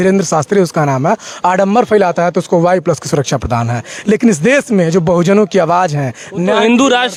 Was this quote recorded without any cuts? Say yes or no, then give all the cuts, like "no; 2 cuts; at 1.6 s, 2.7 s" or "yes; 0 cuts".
yes; 0 cuts